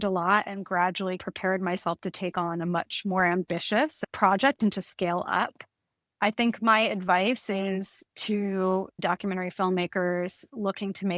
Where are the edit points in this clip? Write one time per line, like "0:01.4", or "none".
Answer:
0:03.9
0:09.0

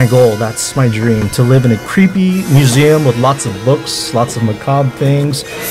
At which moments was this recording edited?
0:01.8

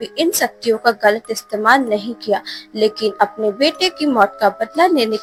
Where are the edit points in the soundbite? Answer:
none

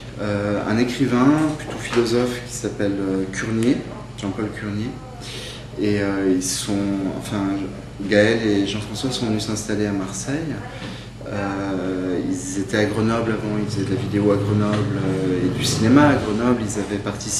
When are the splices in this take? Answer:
0:02.1

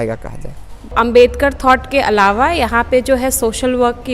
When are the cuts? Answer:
0:00.9

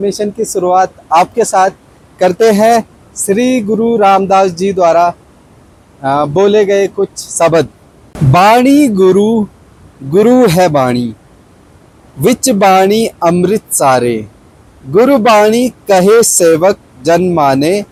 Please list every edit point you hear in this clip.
none

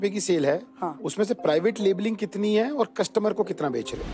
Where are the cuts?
none

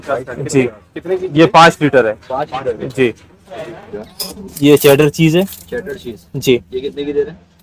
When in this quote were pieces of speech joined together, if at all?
0:03.9

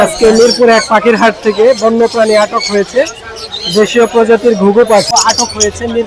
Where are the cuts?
0:05.1

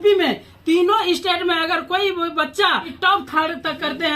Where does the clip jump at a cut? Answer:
0:03.0

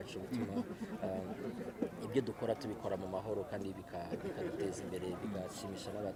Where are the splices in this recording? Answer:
none

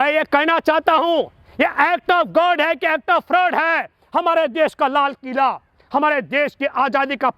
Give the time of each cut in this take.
none

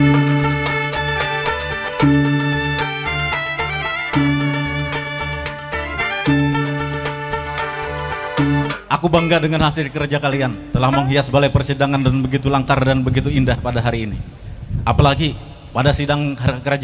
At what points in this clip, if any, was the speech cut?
0:08.7

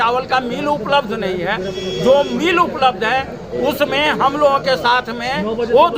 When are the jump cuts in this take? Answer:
none

